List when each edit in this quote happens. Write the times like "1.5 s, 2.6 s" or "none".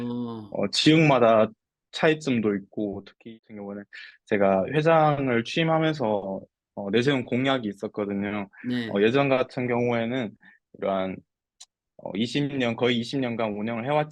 3.3 s